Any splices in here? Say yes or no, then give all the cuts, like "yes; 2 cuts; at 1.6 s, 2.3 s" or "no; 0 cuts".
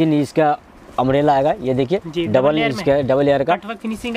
no; 0 cuts